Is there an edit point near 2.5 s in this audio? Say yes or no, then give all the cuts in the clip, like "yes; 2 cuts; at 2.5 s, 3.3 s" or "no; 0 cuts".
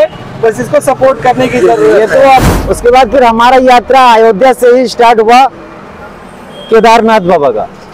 yes; 1 cut; at 2.5 s